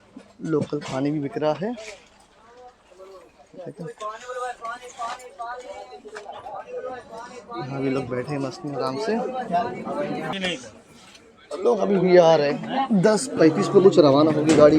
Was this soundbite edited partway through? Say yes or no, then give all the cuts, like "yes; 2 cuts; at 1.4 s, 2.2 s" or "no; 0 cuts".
yes; 1 cut; at 10.3 s